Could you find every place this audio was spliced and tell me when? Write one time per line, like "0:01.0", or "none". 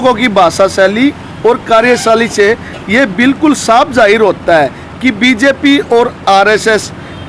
none